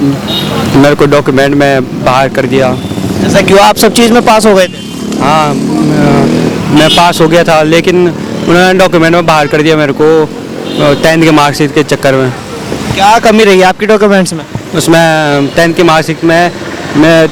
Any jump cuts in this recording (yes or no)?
no